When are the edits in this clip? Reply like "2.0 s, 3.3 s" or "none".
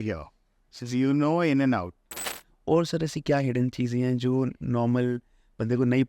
2.3 s